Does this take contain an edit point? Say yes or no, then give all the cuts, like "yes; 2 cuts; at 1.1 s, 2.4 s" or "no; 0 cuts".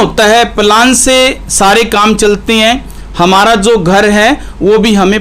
no; 0 cuts